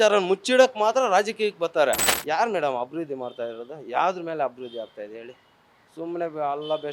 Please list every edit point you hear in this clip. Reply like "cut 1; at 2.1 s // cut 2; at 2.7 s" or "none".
cut 1; at 2.1 s